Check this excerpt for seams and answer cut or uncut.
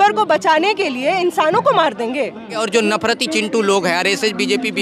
cut